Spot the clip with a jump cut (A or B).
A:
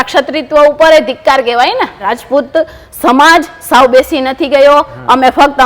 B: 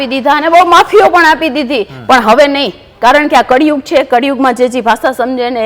A